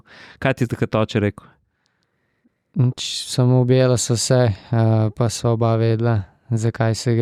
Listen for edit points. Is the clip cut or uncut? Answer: uncut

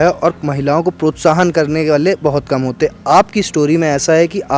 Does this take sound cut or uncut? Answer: uncut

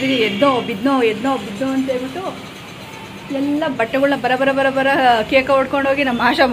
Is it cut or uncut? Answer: uncut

